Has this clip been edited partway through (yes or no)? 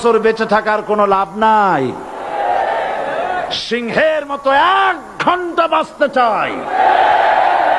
no